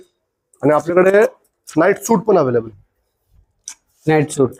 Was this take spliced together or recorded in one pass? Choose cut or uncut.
uncut